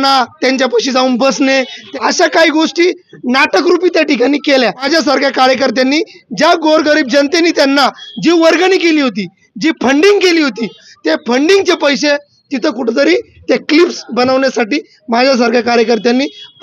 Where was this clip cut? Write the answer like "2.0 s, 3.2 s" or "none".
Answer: 1.8 s, 4.8 s

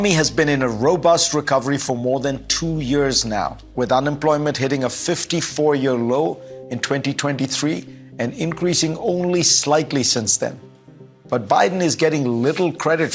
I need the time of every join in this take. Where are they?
10.9 s

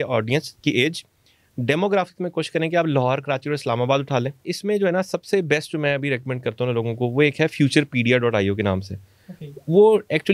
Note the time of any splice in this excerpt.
4.4 s

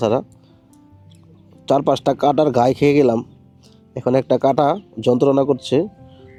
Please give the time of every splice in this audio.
none

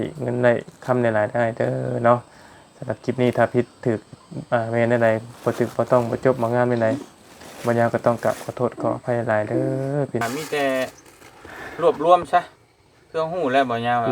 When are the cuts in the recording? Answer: 10.2 s

